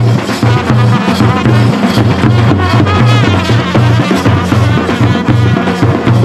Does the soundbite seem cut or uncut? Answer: uncut